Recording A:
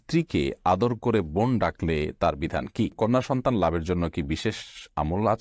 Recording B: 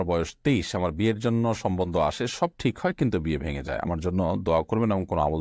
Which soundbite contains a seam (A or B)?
A